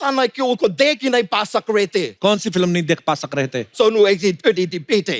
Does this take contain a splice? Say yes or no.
yes